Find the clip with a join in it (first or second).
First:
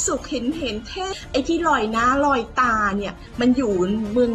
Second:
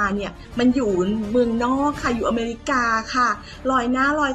first